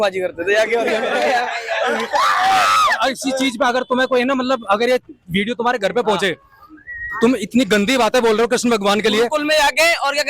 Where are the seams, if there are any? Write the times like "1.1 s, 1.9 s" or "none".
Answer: none

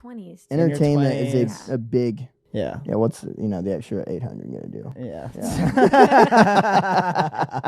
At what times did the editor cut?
2.3 s

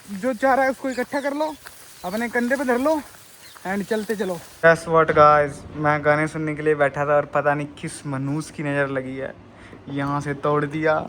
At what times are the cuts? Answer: 4.5 s

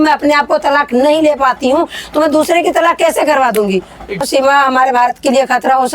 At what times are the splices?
4.2 s

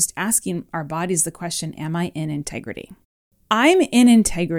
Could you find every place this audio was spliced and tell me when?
3.3 s

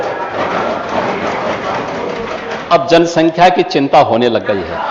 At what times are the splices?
none

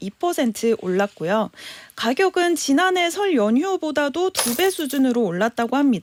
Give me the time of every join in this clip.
none

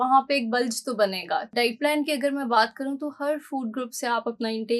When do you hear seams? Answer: 1.5 s

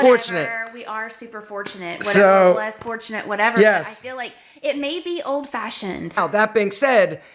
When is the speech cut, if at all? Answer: 6.2 s

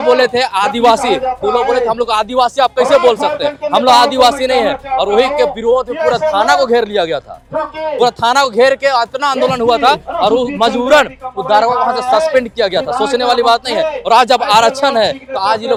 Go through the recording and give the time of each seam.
none

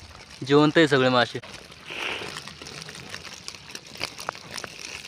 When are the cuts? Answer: 1.5 s

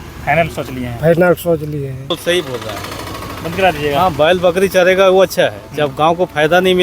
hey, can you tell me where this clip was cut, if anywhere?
2.0 s

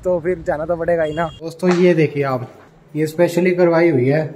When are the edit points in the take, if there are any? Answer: 1.4 s

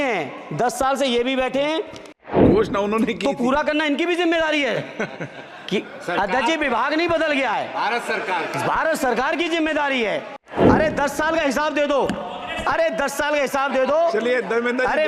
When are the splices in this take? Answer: 2.3 s, 10.4 s

